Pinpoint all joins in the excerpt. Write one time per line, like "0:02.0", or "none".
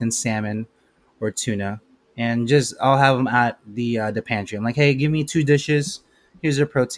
none